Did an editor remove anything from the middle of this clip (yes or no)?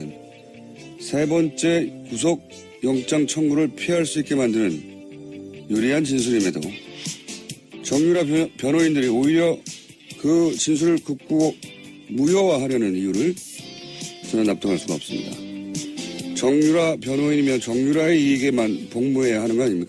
no